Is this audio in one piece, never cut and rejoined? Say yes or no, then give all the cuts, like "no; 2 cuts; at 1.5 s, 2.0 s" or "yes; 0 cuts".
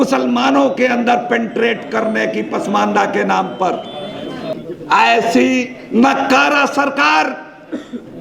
no; 1 cut; at 4.6 s